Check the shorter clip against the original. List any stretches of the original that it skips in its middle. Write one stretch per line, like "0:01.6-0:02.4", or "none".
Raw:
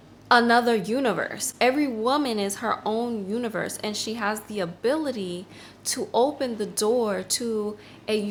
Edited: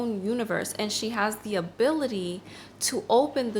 none